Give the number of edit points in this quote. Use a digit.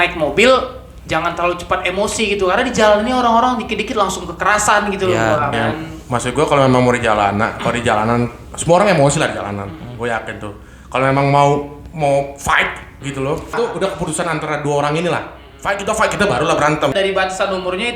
3